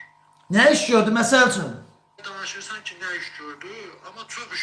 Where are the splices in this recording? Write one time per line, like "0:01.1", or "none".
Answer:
0:02.2